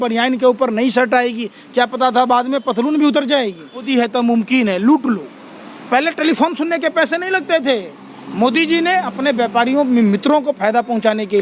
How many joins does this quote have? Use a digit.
1